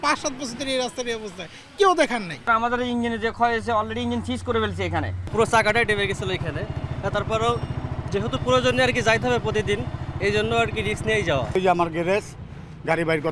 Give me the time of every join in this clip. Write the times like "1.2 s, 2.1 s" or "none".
2.5 s, 5.2 s, 11.5 s